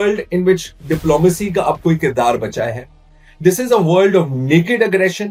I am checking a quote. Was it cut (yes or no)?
no